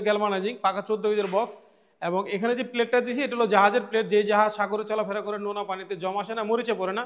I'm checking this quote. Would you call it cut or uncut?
uncut